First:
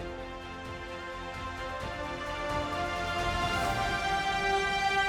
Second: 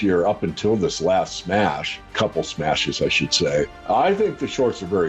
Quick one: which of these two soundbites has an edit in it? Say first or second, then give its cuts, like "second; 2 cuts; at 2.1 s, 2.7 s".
second; 2 cuts; at 2.1 s, 3.8 s